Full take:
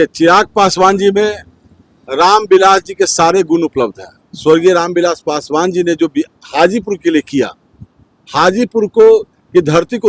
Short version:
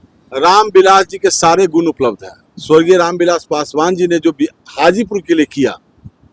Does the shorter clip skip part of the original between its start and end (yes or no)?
no